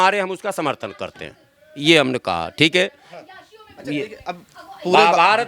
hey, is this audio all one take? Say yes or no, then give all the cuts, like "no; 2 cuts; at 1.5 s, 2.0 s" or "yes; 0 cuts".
yes; 0 cuts